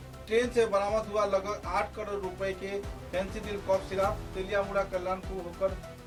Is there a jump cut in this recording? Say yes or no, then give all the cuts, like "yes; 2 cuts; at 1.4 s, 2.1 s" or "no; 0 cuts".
no; 0 cuts